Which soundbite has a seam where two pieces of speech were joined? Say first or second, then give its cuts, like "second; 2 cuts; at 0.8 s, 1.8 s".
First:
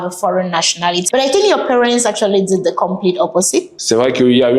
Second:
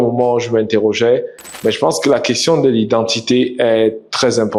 first; 2 cuts; at 1.0 s, 3.8 s